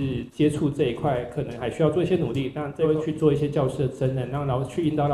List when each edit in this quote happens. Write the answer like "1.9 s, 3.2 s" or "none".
2.7 s